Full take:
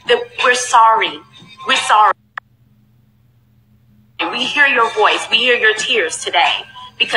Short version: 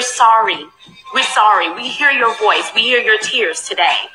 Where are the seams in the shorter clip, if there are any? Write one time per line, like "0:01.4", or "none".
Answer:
0:01.8